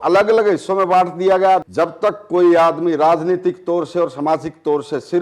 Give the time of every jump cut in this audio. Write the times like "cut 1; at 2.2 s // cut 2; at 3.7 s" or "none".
cut 1; at 1.7 s